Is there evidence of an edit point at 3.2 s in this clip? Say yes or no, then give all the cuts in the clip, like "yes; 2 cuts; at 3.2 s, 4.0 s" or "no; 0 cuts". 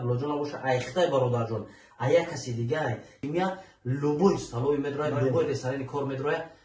yes; 1 cut; at 3.2 s